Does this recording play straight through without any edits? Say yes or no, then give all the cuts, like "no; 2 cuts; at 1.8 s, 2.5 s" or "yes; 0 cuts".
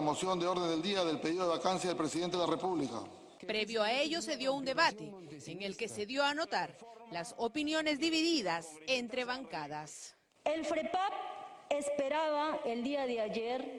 yes; 0 cuts